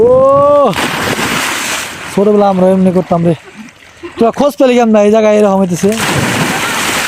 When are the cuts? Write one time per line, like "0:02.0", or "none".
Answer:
none